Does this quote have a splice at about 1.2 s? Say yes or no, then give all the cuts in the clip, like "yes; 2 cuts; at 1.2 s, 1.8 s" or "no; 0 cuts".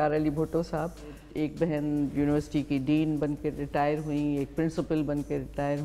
yes; 1 cut; at 1.2 s